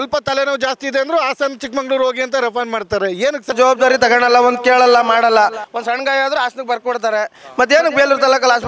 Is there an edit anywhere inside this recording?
yes; 1 cut; at 3.5 s

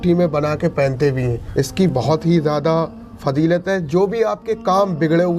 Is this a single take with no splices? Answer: no; 1 cut; at 1.4 s

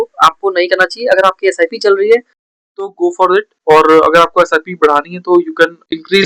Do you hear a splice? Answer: no; 0 cuts

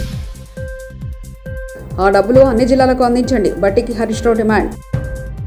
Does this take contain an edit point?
yes; 1 cut; at 1.5 s

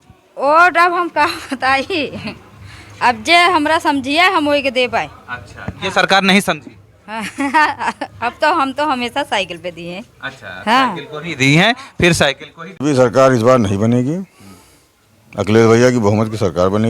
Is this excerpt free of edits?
no; 1 cut; at 12.7 s

